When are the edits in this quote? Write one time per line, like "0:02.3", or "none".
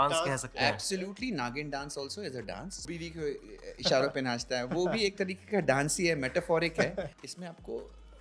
0:02.8
0:07.2